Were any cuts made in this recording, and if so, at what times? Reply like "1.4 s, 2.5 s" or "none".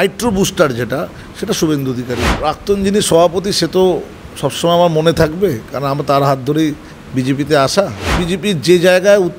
2.3 s, 8.2 s